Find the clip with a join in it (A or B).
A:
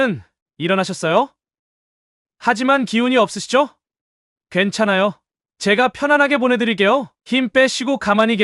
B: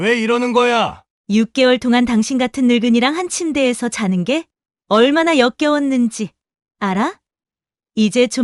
B